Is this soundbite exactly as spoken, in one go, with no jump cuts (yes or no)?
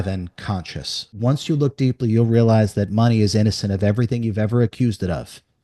no